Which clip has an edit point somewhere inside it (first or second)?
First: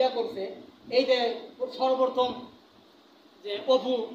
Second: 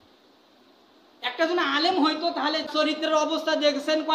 second